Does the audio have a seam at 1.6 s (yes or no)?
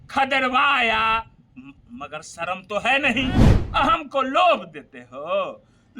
no